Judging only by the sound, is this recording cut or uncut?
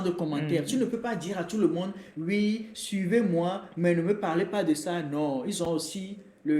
uncut